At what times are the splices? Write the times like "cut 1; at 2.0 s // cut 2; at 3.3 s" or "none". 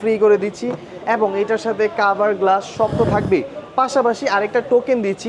none